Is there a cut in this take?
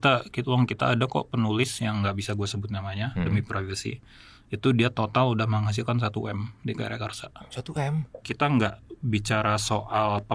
yes; 1 cut; at 8.3 s

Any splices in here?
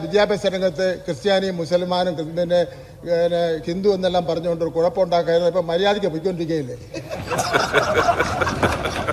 no; 0 cuts

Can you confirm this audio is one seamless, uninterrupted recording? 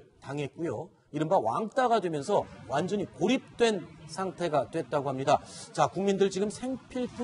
yes; 0 cuts

